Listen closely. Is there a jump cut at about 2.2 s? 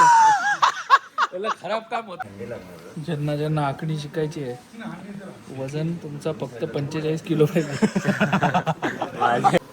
yes; 1 cut; at 2.2 s

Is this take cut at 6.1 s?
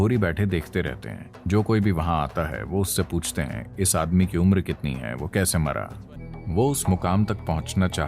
yes; 1 cut; at 6.1 s

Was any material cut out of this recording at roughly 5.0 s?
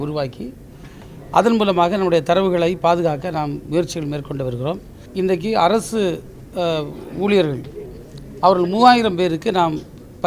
yes; 1 cut; at 5.0 s

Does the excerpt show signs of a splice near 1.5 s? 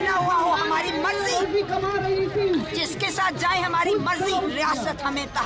no; 1 cut; at 4.4 s

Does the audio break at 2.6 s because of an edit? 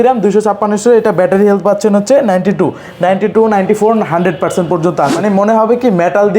no; 1 cut; at 5.2 s

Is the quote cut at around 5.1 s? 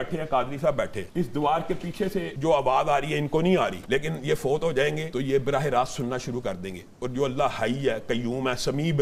yes; 4 cuts; at 1.0 s, 2.3 s, 3.8 s, 5.1 s

